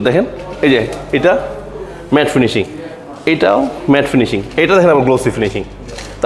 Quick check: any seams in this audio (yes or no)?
no